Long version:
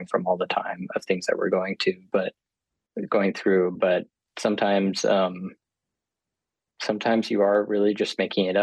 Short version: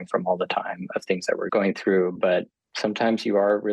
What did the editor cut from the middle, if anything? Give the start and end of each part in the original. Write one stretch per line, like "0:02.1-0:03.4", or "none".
0:01.5-0:03.1
0:04.2-0:06.7